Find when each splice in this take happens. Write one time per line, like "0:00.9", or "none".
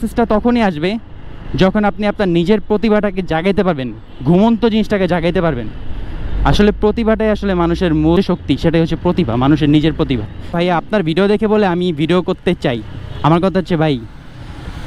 0:08.2
0:10.5